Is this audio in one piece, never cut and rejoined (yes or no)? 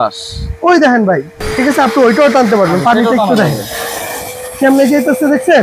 no